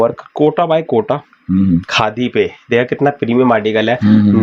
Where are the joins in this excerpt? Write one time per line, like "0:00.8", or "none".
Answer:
0:01.9